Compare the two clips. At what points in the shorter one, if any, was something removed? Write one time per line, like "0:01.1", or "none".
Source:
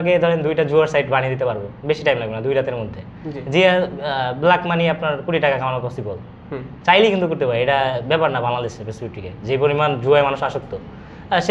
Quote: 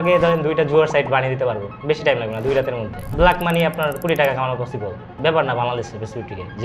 0:03.1
0:05.1